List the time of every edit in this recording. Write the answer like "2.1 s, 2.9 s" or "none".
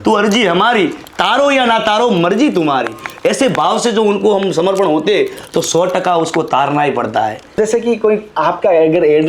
7.6 s